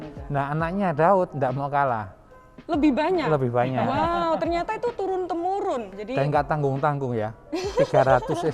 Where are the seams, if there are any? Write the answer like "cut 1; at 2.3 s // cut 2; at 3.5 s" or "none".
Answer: cut 1; at 6.0 s